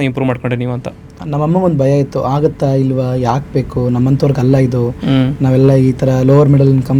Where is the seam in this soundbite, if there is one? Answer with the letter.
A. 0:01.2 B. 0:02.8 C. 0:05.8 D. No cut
A